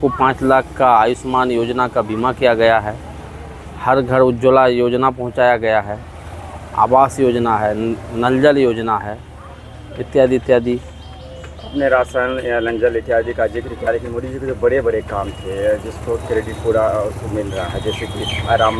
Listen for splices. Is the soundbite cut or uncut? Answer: uncut